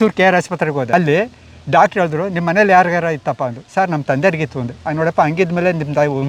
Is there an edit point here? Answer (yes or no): yes